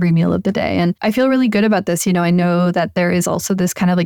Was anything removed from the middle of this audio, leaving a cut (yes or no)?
yes